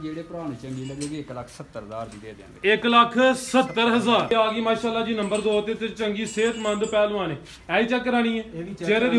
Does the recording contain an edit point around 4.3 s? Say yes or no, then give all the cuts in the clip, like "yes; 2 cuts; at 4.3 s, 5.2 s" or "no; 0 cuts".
yes; 1 cut; at 4.3 s